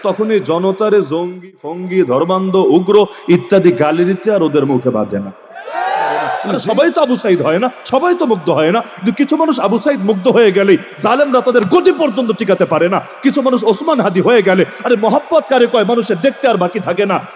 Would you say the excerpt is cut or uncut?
cut